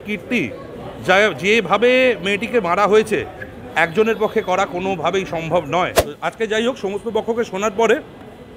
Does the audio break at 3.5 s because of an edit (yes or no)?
no